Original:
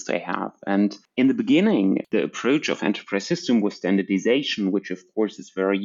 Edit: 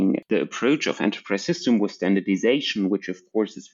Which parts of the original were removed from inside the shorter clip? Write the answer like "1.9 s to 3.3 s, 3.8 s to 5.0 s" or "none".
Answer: none